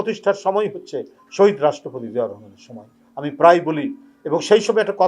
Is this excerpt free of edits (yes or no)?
yes